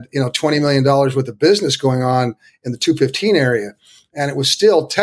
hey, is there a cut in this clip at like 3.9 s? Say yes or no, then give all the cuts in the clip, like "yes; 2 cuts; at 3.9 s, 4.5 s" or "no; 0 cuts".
no; 0 cuts